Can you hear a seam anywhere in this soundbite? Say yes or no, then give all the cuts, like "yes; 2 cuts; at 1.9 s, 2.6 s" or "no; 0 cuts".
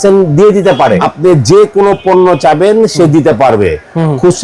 yes; 1 cut; at 1.0 s